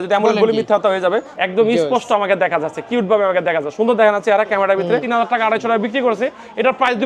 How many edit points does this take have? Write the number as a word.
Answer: two